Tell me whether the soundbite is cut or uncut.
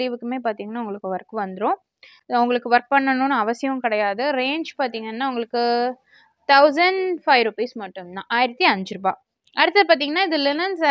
uncut